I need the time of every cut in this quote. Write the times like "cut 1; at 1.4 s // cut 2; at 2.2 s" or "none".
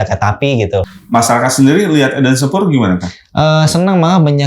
cut 1; at 1.0 s